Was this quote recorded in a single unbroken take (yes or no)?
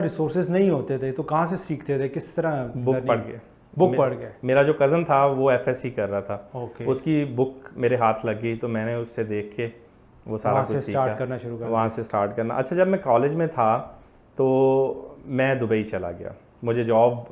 yes